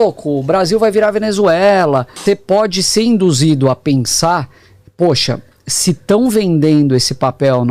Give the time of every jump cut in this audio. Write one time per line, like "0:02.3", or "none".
0:02.2